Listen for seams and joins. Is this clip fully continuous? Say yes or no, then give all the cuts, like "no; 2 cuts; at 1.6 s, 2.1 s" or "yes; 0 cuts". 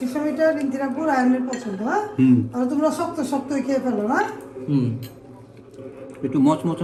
yes; 0 cuts